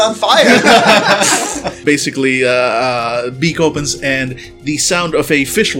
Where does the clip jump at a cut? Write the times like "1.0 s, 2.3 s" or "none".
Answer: 1.7 s